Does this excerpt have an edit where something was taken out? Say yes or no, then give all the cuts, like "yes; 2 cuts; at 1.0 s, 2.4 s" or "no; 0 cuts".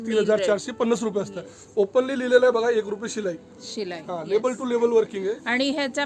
no; 0 cuts